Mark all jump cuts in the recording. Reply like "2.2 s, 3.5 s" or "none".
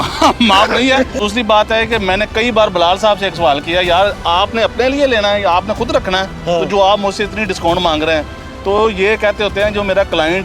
1.2 s

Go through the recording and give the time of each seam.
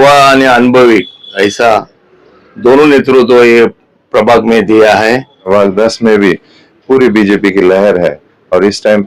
5.5 s

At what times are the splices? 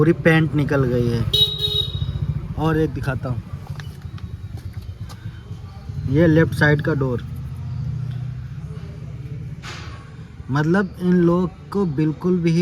none

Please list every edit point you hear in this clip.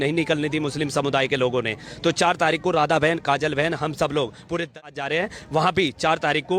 4.8 s

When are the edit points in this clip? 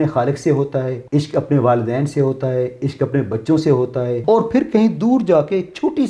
1.0 s, 4.2 s

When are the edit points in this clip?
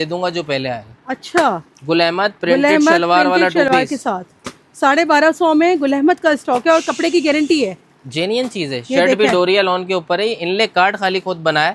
none

